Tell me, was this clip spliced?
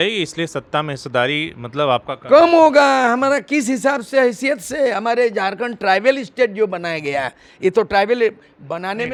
no; 0 cuts

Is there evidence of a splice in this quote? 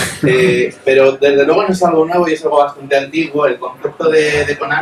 no; 0 cuts

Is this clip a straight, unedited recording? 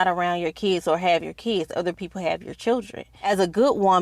no; 1 cut; at 3.1 s

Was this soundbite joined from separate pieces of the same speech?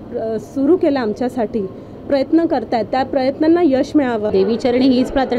yes; 1 cut; at 4.2 s

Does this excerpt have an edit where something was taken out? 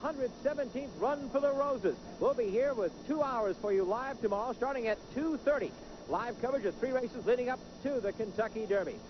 no; 0 cuts

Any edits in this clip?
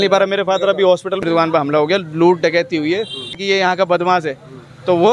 yes; 2 cuts; at 1.2 s, 3.4 s

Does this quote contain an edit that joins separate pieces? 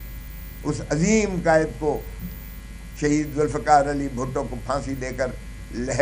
no; 0 cuts

